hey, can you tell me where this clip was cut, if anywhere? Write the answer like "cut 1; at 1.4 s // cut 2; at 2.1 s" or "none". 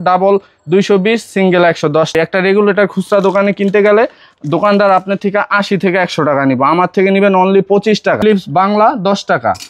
cut 1; at 2.1 s // cut 2; at 8.2 s